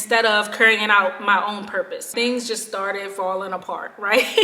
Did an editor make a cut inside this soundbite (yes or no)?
yes